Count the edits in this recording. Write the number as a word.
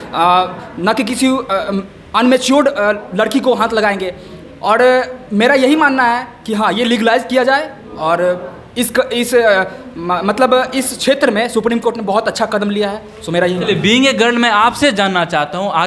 zero